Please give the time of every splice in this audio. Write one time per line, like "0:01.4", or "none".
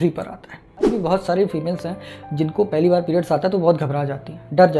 0:00.9